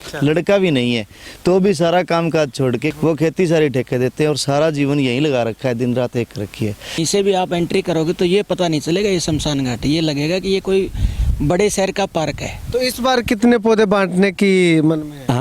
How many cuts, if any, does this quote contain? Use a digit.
3